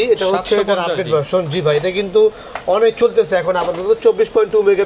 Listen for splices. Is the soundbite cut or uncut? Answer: uncut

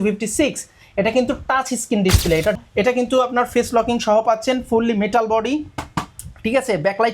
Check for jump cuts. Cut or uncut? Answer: cut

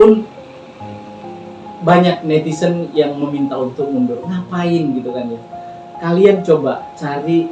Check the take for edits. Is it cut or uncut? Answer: uncut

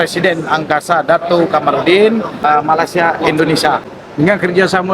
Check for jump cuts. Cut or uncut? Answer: cut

